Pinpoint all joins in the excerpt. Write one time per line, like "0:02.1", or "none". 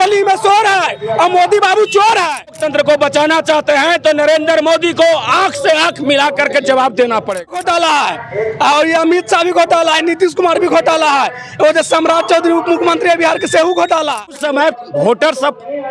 0:02.6
0:07.6
0:14.4